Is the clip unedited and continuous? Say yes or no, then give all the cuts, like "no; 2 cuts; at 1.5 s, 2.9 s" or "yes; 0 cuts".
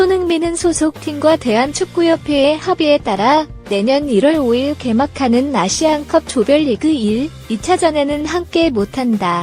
yes; 0 cuts